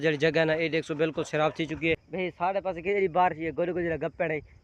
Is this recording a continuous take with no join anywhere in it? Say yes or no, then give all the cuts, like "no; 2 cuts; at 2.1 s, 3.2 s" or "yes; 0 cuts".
no; 1 cut; at 2.0 s